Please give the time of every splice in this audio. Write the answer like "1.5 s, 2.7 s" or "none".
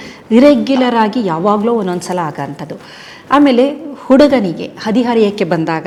none

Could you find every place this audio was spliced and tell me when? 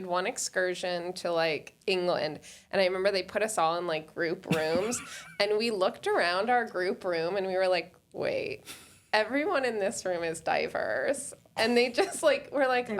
1.7 s

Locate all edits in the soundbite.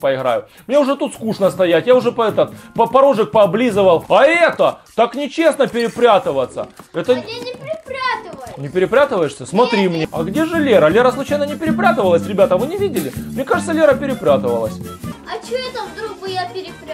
4.0 s, 10.1 s

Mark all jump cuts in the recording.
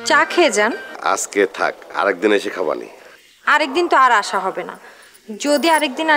0.9 s

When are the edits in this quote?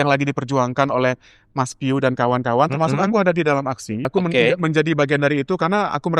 4.1 s

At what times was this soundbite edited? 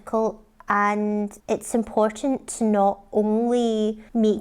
none

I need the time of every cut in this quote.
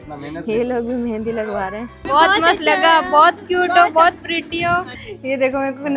1.9 s, 5.0 s

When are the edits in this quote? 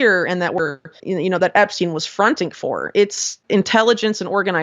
1.0 s, 3.3 s

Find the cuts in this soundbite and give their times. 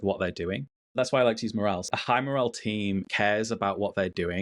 0.9 s, 1.8 s, 3.1 s

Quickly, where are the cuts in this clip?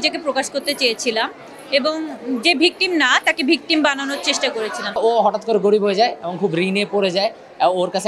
5.0 s

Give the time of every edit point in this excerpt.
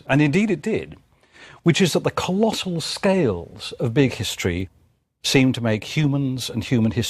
2.2 s

